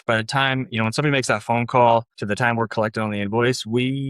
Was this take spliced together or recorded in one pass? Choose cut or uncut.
cut